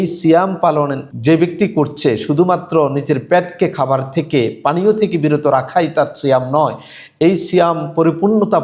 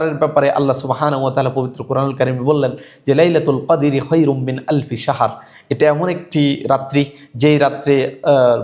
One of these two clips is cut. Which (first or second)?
first